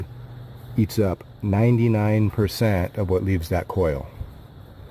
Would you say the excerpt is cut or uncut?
cut